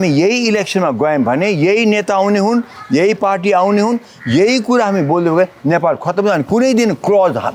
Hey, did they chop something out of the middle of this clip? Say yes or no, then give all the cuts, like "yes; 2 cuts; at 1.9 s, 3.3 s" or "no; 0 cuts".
no; 0 cuts